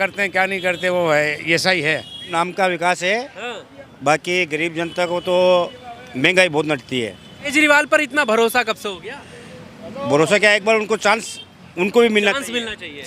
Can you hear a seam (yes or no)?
yes